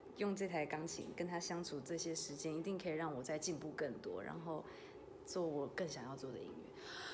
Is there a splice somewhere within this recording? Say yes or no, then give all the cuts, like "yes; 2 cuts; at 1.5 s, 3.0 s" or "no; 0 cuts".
no; 0 cuts